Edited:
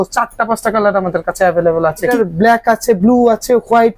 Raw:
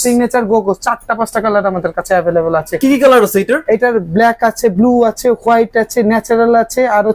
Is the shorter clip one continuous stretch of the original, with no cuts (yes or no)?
no